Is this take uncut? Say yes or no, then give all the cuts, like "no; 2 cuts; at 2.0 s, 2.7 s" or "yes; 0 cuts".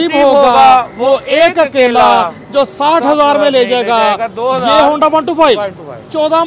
yes; 0 cuts